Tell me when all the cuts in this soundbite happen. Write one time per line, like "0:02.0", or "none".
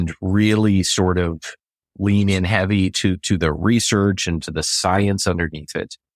none